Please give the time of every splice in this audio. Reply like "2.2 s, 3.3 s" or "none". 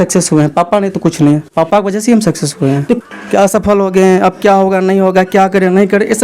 3.0 s